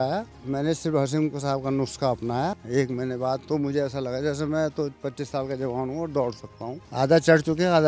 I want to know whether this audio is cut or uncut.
cut